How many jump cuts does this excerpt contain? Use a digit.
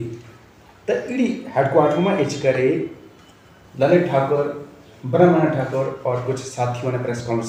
0